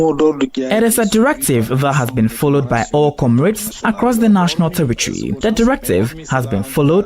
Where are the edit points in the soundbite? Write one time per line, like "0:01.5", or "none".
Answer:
0:05.4